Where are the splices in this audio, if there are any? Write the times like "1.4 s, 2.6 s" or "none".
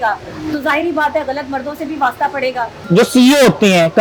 2.8 s